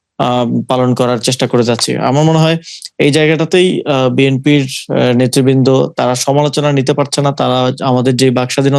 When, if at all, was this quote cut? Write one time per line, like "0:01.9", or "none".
none